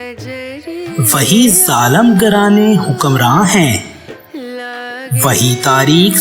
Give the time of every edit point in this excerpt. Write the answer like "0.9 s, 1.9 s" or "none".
1.0 s